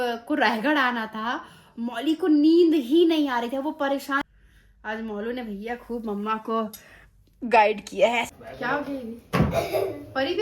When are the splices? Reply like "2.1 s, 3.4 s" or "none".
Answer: 4.2 s, 8.2 s